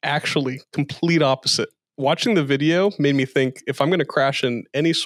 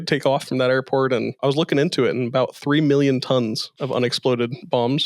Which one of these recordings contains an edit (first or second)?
second